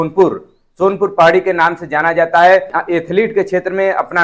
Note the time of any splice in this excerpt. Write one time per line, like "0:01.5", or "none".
0:02.8